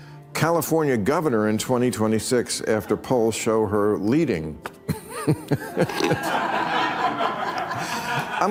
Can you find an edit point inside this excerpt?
no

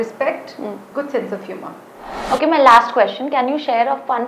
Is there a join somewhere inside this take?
no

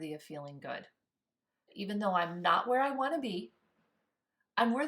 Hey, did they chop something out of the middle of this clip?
yes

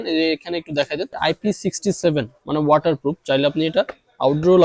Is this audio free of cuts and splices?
no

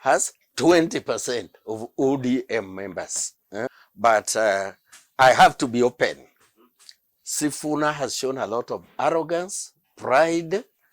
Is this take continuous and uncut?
no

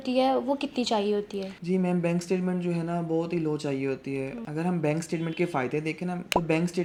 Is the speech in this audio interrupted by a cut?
no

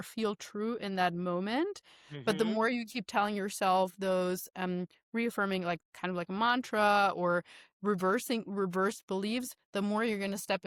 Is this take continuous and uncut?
yes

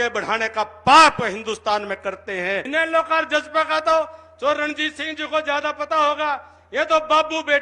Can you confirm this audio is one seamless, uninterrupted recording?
no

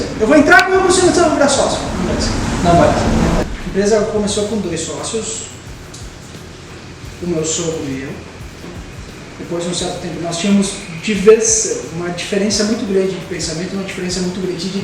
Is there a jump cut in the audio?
yes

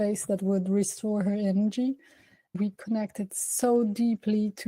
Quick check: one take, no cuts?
no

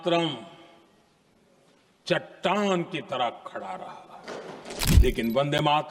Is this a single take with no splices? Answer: no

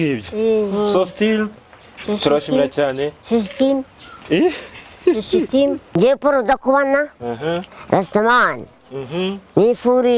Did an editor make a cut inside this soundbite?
yes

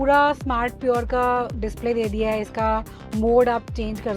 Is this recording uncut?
no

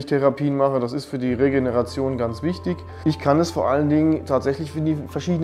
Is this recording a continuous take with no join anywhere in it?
no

